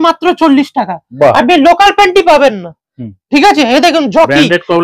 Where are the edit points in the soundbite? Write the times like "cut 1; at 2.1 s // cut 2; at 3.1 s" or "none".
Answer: none